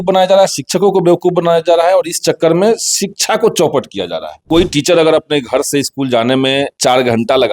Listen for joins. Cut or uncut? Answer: cut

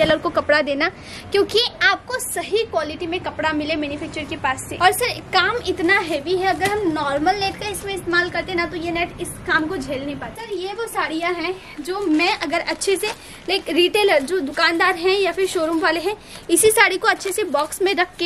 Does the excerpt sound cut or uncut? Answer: cut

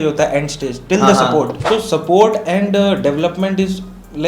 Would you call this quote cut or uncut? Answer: cut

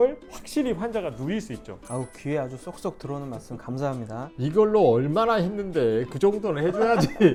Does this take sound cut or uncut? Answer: uncut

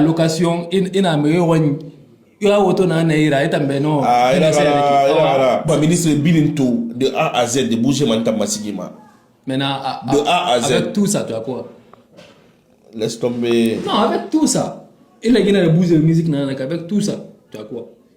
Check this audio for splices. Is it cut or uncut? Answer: cut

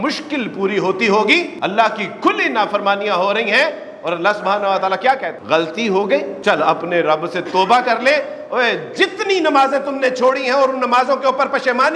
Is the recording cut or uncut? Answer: cut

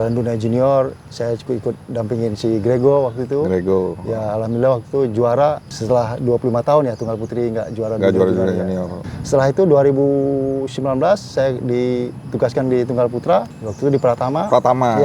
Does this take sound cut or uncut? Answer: uncut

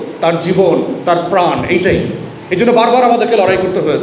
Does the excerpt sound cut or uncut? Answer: uncut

